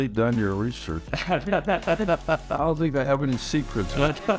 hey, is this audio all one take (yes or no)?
yes